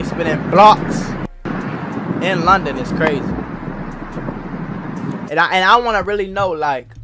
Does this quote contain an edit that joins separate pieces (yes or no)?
no